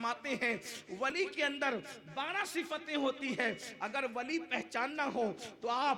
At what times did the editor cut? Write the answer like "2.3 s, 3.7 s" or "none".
1.1 s